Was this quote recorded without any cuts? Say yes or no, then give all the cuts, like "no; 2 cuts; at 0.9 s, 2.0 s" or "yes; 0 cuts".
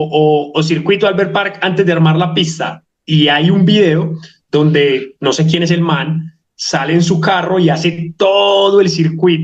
yes; 0 cuts